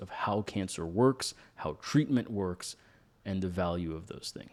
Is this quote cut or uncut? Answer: uncut